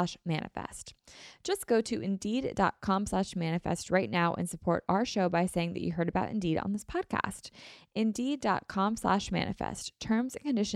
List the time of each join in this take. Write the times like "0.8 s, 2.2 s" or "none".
none